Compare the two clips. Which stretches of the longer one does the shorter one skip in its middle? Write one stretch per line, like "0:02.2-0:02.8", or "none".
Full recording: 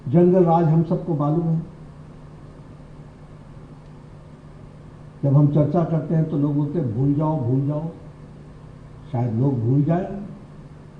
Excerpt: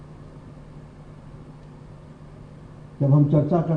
none